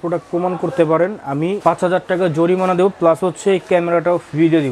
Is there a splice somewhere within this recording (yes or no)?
no